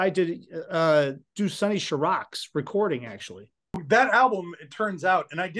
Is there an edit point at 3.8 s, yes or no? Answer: yes